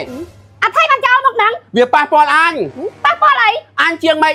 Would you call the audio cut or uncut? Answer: uncut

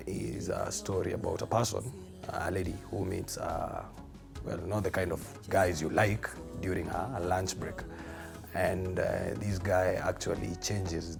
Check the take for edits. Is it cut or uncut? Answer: uncut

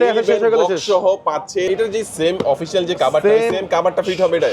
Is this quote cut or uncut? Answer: cut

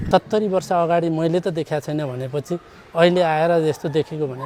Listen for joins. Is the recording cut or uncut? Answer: uncut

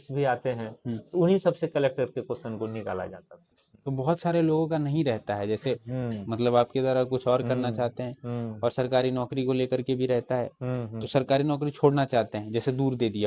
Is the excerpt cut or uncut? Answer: cut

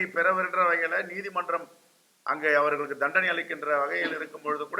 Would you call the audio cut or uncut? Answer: uncut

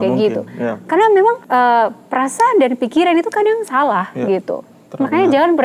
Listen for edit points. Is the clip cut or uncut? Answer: cut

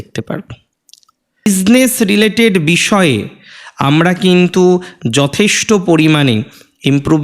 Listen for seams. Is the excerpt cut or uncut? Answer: cut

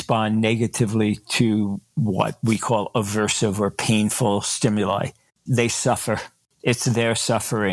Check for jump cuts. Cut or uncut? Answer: uncut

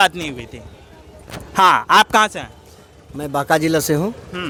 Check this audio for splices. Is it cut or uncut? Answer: uncut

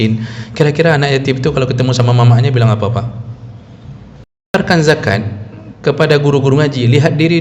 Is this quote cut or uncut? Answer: cut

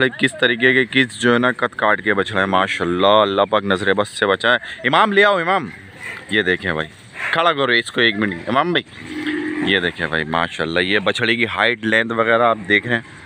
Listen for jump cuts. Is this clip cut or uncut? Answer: uncut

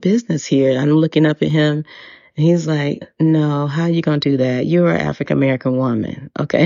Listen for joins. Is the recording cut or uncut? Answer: uncut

